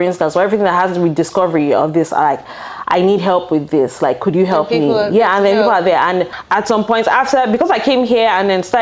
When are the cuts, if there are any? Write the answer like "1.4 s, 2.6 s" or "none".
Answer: 6.4 s